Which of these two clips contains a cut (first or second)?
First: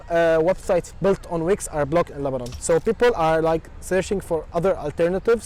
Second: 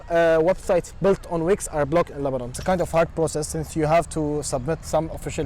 second